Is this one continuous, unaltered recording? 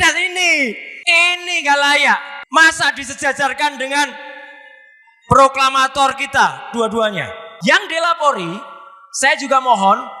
no; 3 cuts; at 0.9 s, 2.4 s, 7.4 s

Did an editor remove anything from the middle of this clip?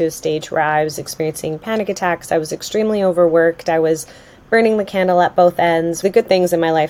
yes; 1 cut; at 6.0 s

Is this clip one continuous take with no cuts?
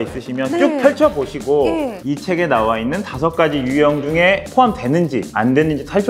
no; 1 cut; at 2.0 s

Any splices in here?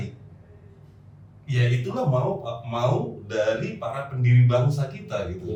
no; 0 cuts

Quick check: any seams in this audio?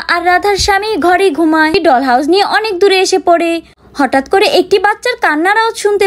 yes; 1 cut; at 1.7 s

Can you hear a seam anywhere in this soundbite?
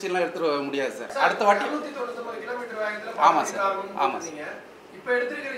no; 0 cuts

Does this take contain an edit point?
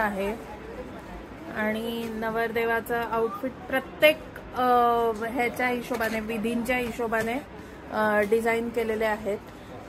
no; 0 cuts

